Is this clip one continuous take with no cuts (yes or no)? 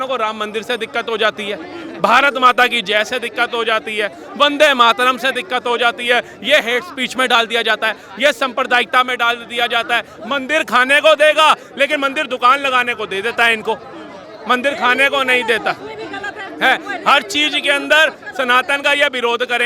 yes